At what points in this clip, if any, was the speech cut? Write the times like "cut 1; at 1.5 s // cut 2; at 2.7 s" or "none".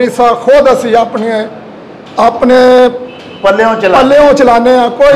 none

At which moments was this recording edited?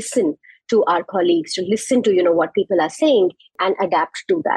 cut 1; at 3.6 s

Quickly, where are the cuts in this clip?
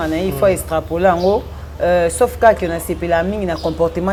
none

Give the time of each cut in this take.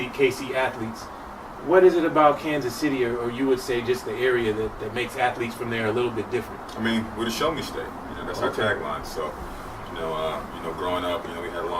none

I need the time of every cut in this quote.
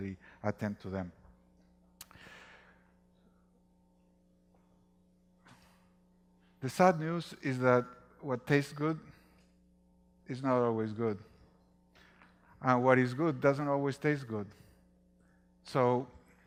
none

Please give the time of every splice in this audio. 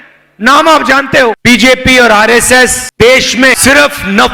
cut 1; at 1.4 s // cut 2; at 2.8 s // cut 3; at 3.6 s

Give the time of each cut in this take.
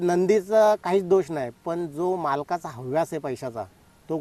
none

